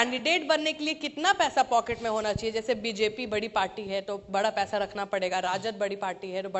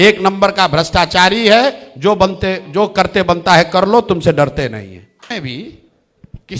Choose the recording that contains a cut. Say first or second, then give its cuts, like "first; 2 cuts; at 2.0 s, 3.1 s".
second; 1 cut; at 5.3 s